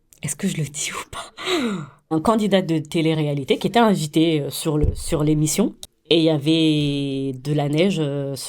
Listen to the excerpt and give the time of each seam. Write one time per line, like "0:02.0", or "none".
0:02.1
0:05.9